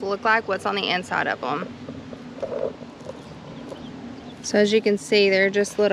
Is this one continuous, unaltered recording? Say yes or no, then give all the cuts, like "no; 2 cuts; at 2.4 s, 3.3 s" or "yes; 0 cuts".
yes; 0 cuts